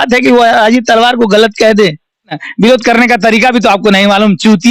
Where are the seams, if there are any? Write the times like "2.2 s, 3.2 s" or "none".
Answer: 2.4 s